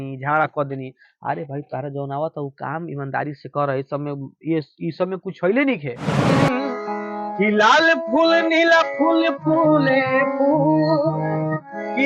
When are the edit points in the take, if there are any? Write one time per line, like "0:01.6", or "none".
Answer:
0:06.3